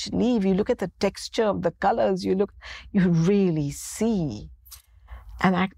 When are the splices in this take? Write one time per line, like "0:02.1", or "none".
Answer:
none